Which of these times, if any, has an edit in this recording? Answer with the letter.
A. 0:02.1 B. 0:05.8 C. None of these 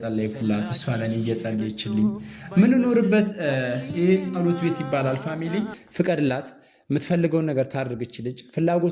B